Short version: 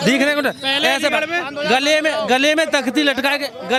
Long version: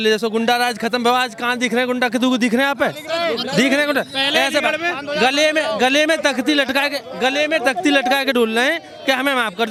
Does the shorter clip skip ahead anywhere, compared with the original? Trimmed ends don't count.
no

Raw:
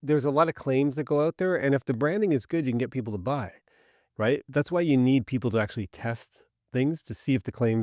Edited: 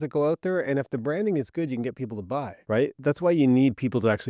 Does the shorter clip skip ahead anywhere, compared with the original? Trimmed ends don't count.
yes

